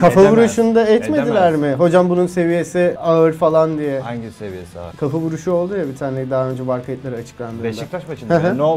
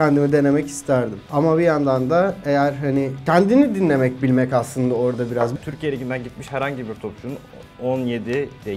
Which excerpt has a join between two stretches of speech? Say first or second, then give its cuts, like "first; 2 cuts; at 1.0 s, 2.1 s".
second; 1 cut; at 5.5 s